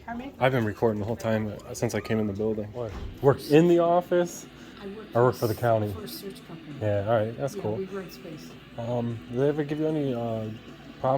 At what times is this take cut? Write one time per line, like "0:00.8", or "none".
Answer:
0:03.0